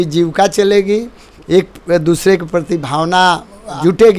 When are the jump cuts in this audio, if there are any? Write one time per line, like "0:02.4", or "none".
0:01.3